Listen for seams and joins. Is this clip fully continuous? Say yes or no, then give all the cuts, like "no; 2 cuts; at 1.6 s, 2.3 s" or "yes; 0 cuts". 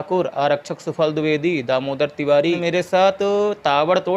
no; 1 cut; at 2.6 s